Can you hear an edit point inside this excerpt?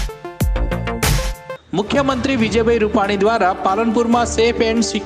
yes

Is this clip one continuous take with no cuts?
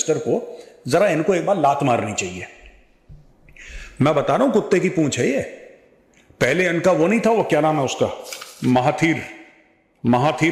yes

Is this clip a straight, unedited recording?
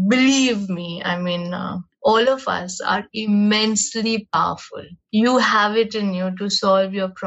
no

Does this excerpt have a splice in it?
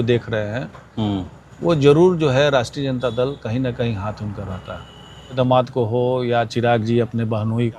yes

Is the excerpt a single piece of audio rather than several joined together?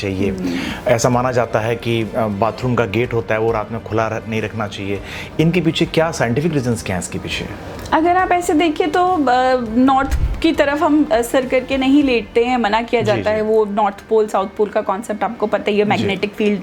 yes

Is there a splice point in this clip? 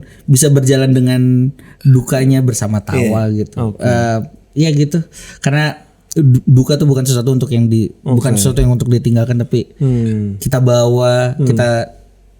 no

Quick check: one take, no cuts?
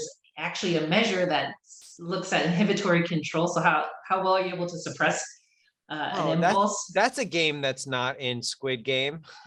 yes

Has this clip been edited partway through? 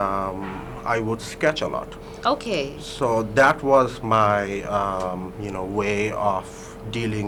no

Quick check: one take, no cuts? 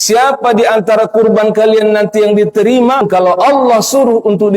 no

